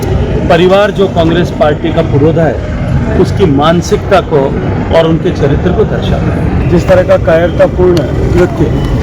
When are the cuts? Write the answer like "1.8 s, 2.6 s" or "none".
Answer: none

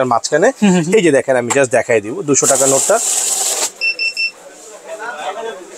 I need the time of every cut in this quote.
none

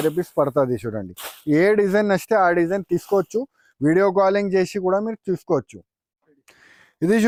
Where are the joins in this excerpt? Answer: none

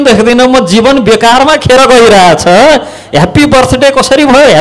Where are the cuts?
none

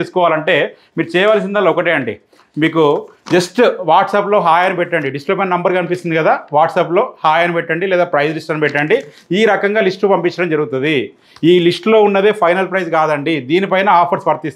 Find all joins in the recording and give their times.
none

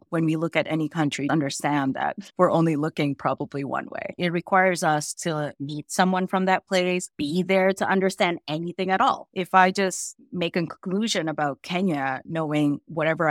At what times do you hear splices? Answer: 1.3 s, 4.2 s

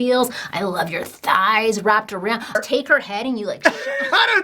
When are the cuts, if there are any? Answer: 2.6 s

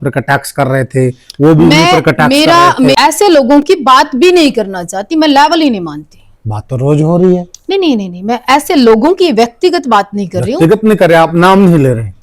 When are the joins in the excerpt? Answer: 2.9 s

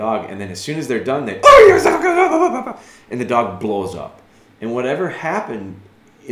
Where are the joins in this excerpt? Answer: none

